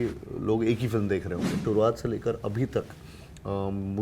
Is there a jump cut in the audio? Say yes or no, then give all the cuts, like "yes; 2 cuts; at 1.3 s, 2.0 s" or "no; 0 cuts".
yes; 1 cut; at 1.5 s